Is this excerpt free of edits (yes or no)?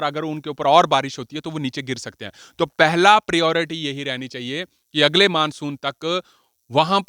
yes